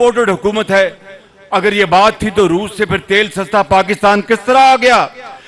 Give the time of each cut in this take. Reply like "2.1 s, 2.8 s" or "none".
none